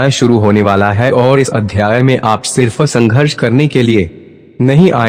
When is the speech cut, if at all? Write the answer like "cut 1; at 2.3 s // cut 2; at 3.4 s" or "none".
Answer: none